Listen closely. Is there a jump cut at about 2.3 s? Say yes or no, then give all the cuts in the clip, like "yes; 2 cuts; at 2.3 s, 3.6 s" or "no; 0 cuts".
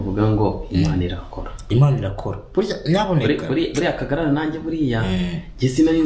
no; 0 cuts